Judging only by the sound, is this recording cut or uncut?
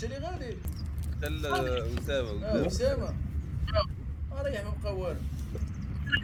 uncut